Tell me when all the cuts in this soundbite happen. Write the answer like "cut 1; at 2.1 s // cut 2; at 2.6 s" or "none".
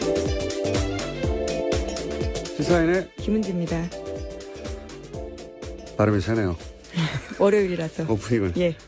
none

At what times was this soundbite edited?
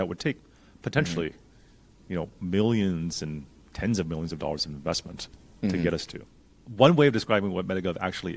cut 1; at 6.5 s

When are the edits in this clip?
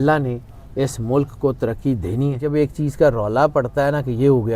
cut 1; at 2.4 s

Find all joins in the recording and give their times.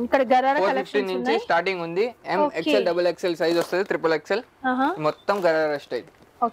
none

